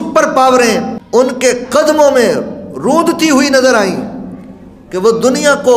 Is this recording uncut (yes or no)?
no